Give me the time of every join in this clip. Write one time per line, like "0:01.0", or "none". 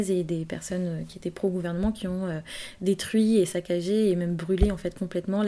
none